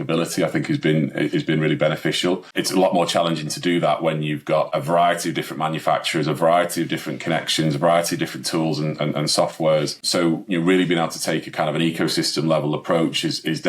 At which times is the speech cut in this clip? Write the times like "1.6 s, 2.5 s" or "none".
2.5 s, 4.7 s, 10.0 s